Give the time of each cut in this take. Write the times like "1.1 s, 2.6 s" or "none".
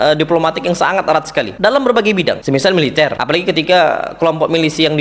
1.5 s, 2.4 s, 3.2 s